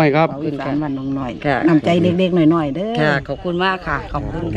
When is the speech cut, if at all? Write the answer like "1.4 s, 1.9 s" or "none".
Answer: none